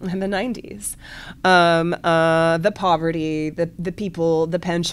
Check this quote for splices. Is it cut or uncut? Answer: uncut